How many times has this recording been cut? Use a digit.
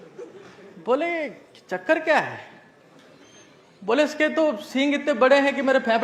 0